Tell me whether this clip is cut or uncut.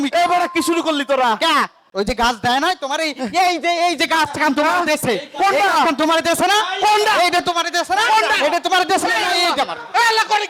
uncut